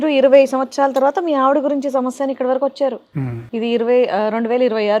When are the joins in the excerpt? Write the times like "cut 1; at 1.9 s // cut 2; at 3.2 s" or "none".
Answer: none